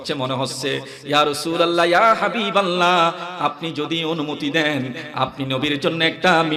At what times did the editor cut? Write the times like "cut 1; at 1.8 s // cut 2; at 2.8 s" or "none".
none